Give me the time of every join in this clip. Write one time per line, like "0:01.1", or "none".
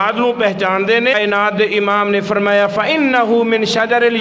0:01.1

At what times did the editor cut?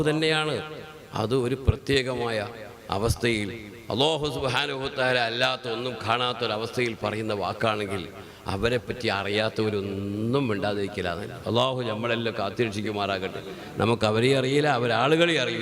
none

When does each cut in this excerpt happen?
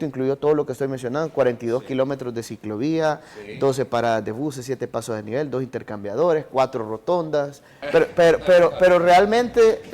0:07.7

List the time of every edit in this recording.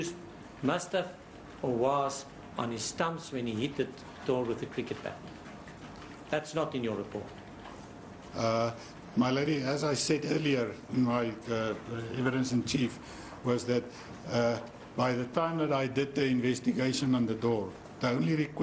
0:05.6

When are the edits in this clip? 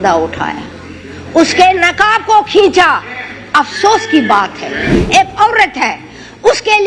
0:04.9

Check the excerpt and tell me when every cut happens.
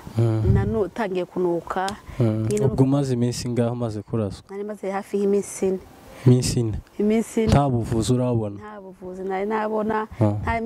none

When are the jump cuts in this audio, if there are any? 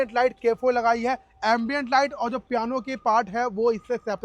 none

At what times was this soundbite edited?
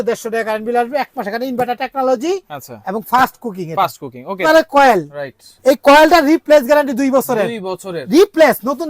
0:04.4

